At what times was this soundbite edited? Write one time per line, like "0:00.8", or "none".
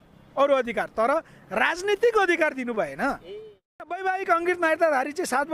0:03.8